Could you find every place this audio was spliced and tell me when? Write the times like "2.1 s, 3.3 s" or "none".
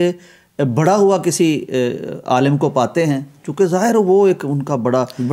none